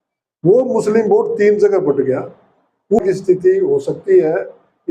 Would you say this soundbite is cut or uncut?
cut